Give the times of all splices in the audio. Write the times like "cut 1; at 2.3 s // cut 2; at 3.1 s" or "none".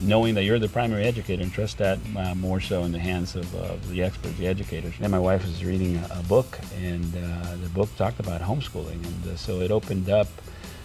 cut 1; at 4.8 s